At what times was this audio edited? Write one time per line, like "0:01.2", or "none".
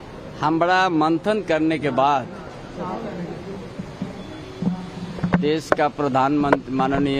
0:04.5